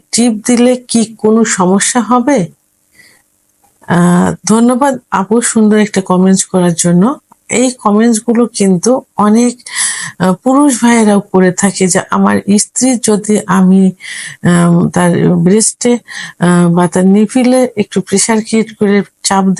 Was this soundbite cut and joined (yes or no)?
no